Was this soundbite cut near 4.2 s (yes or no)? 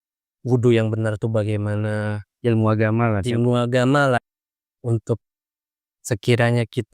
yes